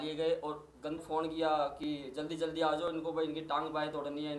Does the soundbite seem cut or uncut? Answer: cut